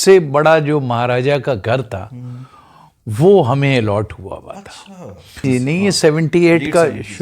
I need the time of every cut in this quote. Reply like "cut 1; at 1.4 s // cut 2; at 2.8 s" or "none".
cut 1; at 5.4 s